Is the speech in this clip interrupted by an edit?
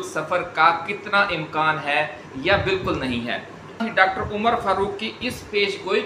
yes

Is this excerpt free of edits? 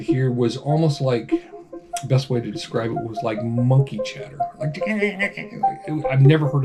yes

